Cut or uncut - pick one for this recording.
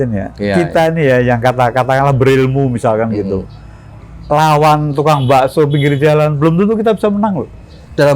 uncut